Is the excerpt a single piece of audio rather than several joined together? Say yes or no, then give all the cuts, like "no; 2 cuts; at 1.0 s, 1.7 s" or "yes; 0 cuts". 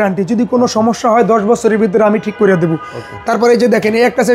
yes; 0 cuts